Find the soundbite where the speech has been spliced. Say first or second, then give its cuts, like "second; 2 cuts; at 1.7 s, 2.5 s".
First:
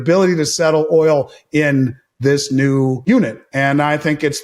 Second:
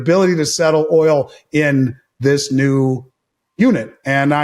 first; 1 cut; at 3.0 s